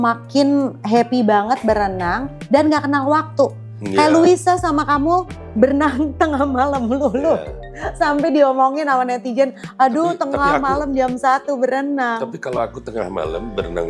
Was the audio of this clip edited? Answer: no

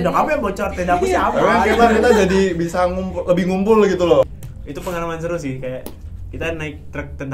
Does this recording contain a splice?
yes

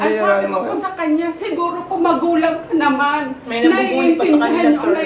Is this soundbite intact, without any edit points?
yes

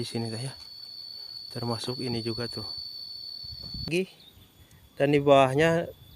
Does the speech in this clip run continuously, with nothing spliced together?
no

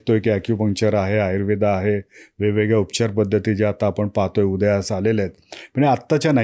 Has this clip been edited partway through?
no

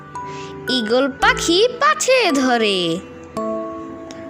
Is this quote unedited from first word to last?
no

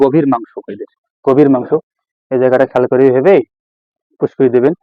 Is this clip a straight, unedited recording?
yes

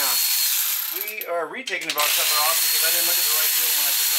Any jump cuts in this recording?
no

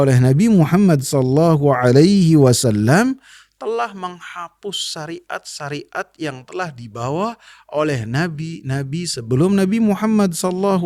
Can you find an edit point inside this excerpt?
no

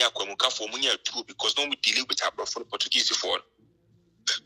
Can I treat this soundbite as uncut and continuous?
yes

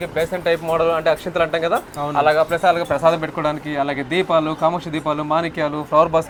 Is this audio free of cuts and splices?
yes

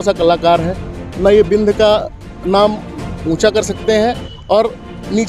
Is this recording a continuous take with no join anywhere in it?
yes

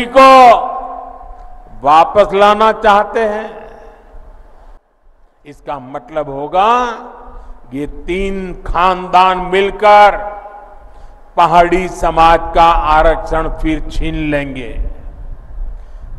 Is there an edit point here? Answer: yes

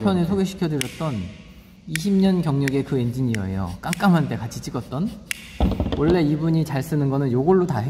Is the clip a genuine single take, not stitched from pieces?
yes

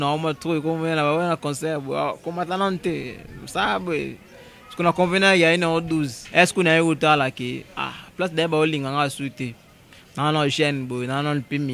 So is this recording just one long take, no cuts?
no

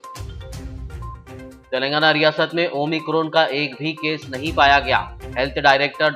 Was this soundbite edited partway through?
no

